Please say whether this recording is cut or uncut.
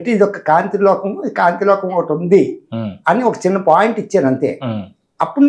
uncut